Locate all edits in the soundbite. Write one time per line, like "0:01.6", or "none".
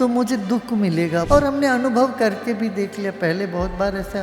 0:01.3